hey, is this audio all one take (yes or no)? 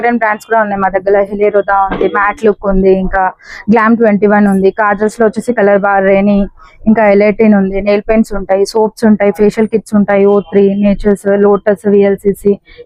yes